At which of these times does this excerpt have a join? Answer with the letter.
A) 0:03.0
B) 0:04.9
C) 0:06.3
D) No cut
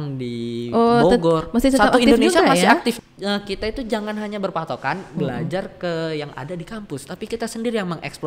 A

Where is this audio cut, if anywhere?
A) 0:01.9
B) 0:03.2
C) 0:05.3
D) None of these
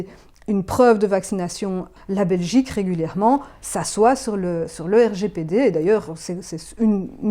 A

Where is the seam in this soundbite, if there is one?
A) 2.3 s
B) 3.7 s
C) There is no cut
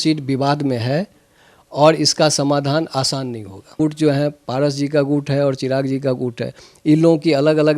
B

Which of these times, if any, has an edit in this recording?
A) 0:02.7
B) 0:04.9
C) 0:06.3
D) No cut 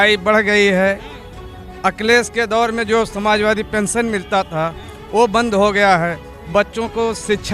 D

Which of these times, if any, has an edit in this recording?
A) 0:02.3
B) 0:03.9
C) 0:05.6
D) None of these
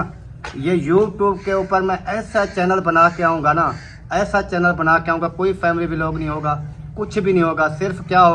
D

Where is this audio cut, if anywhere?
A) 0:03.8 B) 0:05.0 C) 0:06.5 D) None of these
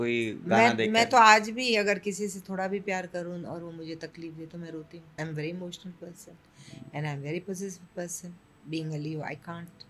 B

